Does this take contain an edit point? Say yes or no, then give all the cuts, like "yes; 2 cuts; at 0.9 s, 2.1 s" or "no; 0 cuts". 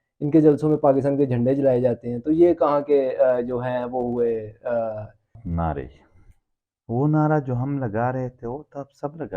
yes; 1 cut; at 5.4 s